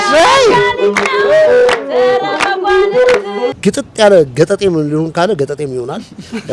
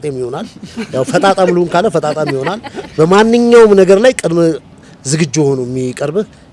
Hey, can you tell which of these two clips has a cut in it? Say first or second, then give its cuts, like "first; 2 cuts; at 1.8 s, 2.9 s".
first; 1 cut; at 3.5 s